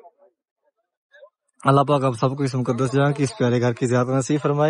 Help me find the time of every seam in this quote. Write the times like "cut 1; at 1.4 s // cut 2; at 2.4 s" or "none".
none